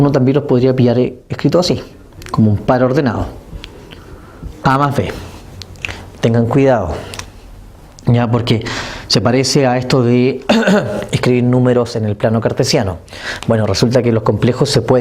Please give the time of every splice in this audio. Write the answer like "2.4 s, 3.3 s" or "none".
5.9 s